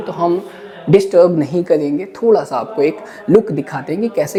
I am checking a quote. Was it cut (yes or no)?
no